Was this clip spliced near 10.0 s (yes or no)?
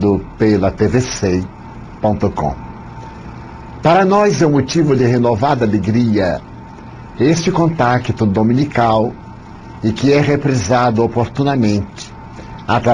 no